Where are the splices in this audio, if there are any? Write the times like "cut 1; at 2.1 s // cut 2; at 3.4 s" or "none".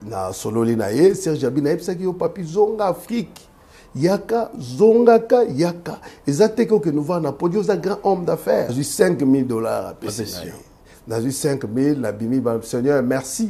cut 1; at 8.8 s